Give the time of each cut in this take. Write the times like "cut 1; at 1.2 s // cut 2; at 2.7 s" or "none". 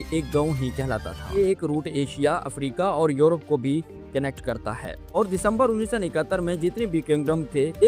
cut 1; at 1.4 s // cut 2; at 5.2 s